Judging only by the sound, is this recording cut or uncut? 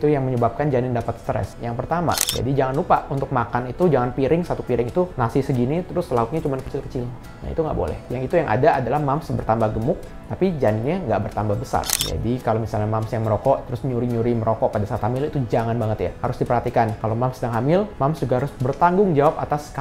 cut